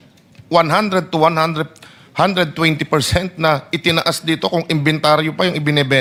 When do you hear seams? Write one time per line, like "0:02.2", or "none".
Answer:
none

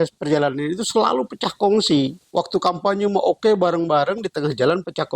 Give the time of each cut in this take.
0:02.2

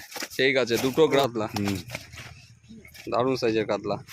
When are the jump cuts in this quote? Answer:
0:01.2

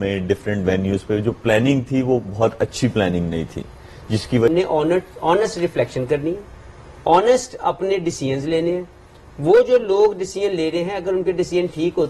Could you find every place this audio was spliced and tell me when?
0:04.5

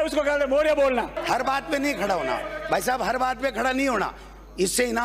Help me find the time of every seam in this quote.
0:01.2

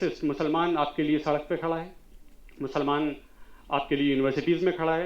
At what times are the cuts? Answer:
none

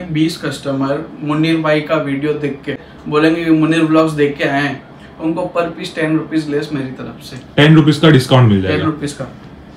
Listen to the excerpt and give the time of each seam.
0:02.9

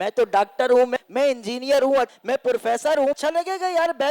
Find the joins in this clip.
0:00.9
0:02.1
0:03.2

